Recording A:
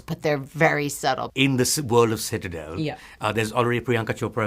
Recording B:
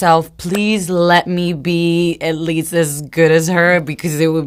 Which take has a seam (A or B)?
A